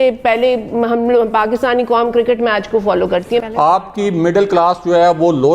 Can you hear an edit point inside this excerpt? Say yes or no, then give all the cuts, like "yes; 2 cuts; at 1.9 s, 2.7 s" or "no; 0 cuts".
yes; 1 cut; at 3.5 s